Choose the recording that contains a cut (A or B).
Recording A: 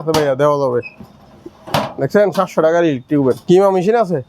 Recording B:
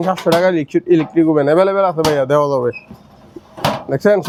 A